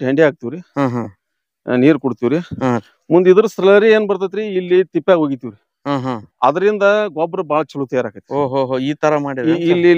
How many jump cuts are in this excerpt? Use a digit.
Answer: 0